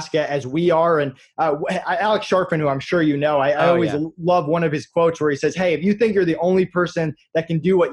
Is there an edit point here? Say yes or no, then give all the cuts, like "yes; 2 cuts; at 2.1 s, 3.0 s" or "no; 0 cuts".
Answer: no; 0 cuts